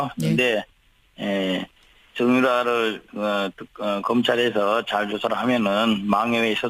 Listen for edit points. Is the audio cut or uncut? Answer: uncut